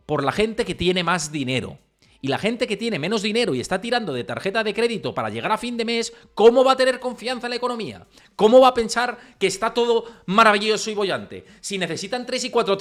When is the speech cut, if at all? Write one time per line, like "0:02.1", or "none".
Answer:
none